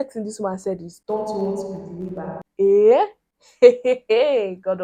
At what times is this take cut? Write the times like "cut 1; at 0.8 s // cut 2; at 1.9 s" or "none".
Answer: none